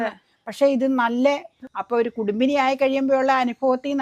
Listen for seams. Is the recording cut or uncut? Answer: cut